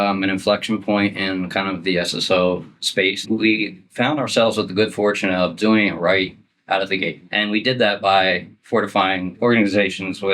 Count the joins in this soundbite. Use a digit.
2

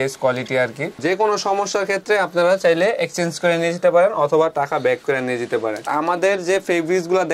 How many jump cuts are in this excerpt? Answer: 2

